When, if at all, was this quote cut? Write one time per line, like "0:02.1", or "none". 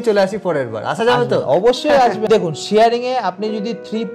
0:02.2